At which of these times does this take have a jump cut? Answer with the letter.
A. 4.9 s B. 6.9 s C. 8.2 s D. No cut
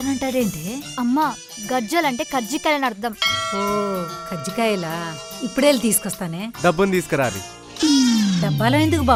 D